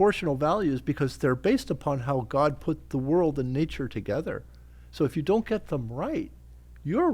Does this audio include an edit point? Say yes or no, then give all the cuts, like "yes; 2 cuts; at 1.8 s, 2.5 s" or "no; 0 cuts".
no; 0 cuts